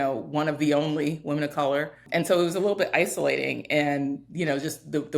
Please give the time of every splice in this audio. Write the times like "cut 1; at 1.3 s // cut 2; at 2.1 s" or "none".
cut 1; at 2.0 s